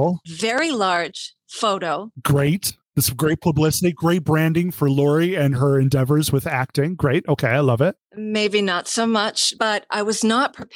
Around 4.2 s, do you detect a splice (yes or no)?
no